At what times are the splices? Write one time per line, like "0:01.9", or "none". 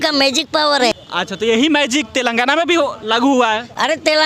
0:00.9